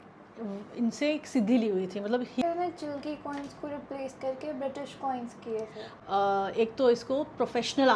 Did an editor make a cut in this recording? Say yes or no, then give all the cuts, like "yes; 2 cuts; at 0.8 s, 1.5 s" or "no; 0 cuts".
yes; 2 cuts; at 2.4 s, 5.8 s